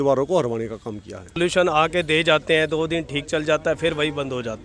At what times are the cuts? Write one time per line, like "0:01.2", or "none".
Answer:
0:01.4